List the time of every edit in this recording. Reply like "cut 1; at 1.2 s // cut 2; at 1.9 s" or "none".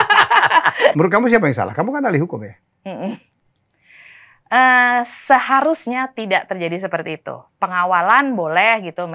cut 1; at 0.9 s